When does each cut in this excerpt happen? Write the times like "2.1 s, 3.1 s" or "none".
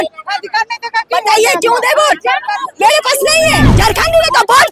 3.7 s